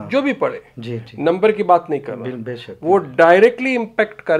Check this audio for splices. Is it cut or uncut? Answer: uncut